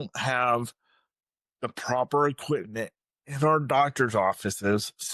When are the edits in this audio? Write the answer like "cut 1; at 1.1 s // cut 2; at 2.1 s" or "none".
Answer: none